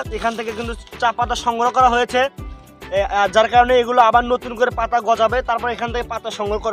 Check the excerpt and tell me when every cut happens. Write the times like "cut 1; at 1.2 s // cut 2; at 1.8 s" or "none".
none